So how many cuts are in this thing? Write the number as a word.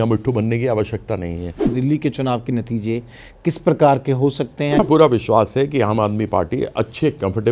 two